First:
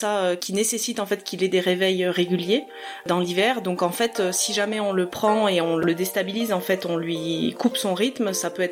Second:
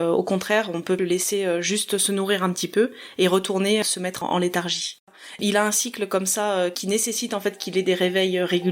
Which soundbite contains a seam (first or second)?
second